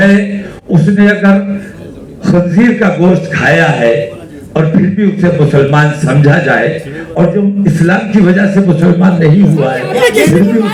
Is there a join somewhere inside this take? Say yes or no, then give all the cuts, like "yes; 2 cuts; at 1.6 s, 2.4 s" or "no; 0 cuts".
no; 0 cuts